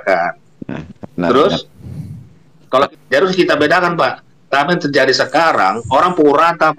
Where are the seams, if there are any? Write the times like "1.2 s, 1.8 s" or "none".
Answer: 2.9 s